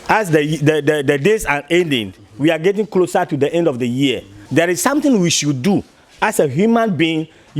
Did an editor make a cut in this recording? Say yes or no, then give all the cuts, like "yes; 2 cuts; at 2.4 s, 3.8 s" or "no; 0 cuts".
yes; 1 cut; at 4.4 s